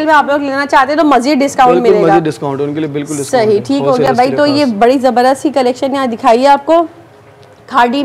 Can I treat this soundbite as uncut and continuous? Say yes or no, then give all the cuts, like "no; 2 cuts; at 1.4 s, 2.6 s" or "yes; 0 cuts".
yes; 0 cuts